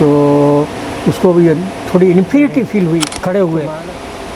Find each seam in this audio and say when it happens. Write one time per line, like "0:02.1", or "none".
0:03.1